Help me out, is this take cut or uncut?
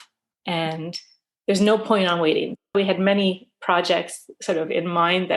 cut